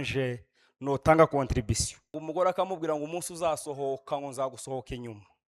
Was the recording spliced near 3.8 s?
no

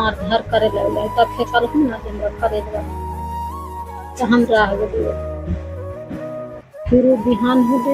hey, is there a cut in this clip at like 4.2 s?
yes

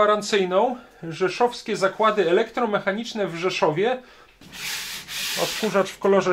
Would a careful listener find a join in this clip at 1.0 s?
no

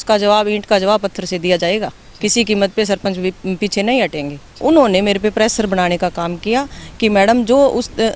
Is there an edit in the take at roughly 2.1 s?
no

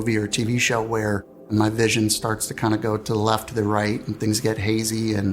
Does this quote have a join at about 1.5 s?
yes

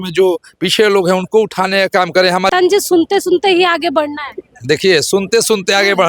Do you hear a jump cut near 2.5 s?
yes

